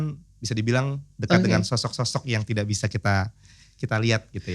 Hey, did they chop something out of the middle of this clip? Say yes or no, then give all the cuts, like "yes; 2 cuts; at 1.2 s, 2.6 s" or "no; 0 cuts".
yes; 1 cut; at 1.1 s